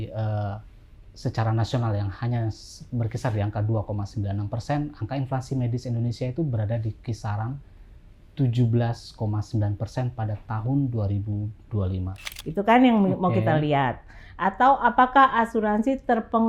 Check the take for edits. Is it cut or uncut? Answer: cut